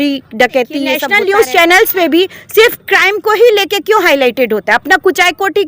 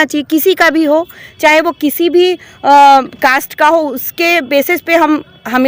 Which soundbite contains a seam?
first; 1 cut; at 1.0 s

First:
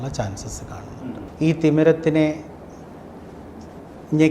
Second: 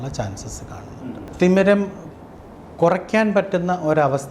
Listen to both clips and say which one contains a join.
first; 1 cut; at 1.2 s

